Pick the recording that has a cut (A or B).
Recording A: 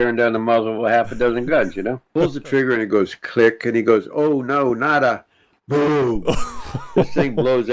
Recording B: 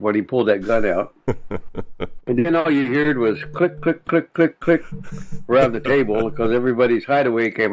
A